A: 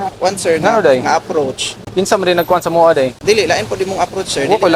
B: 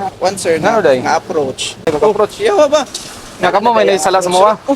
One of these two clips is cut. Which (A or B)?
B